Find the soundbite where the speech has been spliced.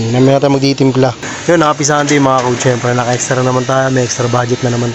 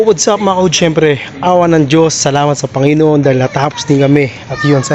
first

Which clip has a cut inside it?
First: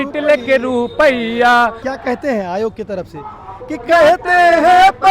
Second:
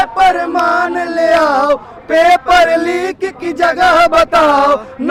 first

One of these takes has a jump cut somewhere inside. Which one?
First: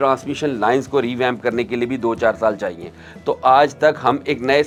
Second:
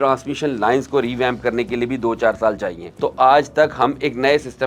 second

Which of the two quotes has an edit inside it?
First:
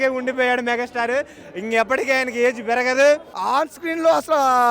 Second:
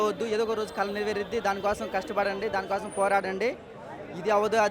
first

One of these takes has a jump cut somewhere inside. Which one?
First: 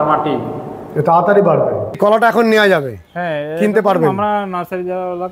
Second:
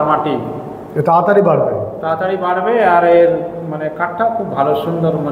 first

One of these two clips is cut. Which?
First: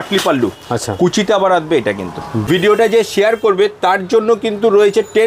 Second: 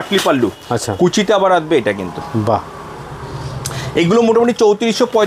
first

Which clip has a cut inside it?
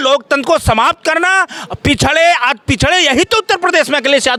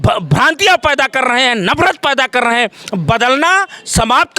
second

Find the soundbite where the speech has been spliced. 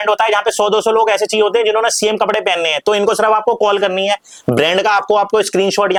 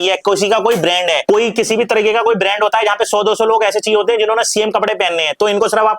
second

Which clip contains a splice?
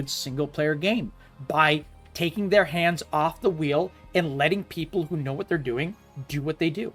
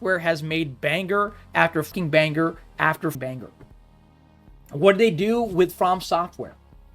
second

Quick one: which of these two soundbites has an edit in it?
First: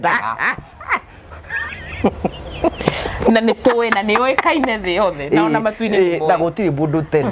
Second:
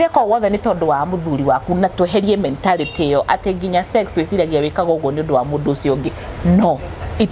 first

